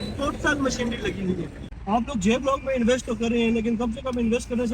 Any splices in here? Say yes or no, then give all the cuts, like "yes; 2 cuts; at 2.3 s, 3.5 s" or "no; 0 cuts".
yes; 1 cut; at 1.5 s